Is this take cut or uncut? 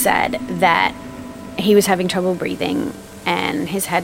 uncut